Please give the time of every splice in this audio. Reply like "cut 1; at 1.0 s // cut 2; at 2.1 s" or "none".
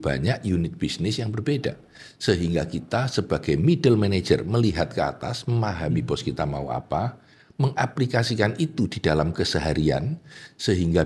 none